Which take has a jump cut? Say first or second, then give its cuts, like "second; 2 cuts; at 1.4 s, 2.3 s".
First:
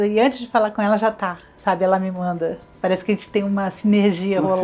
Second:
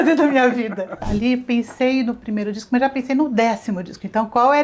second; 1 cut; at 1.0 s